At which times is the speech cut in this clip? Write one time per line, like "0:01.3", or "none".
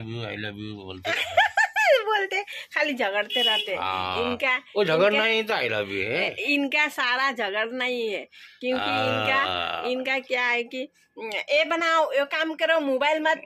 none